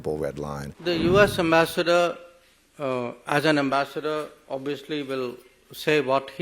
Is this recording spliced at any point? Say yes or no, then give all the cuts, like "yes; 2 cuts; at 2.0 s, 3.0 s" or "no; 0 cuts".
yes; 1 cut; at 0.9 s